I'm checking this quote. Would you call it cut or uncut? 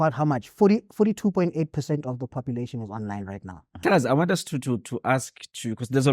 cut